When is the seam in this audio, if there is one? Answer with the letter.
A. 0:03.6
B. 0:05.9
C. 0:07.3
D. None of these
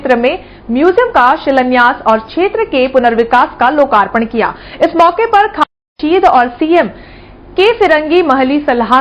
B